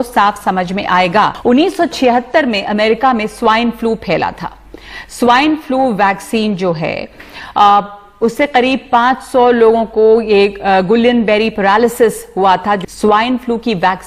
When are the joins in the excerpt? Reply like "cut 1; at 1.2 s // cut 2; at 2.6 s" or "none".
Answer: cut 1; at 1.4 s // cut 2; at 12.8 s